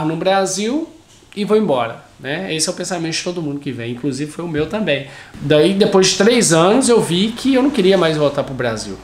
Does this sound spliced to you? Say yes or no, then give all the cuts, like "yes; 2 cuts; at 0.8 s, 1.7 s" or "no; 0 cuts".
yes; 1 cut; at 5.3 s